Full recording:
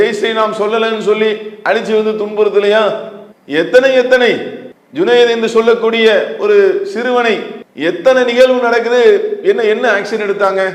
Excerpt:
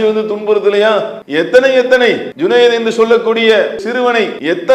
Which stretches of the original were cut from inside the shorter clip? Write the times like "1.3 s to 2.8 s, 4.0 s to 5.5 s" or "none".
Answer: 3.1 s to 3.4 s, 4.5 s to 4.8 s, 6.5 s to 7.3 s